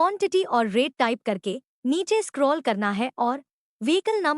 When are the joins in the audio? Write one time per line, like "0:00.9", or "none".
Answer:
0:03.1